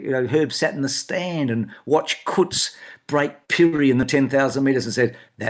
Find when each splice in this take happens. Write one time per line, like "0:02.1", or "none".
none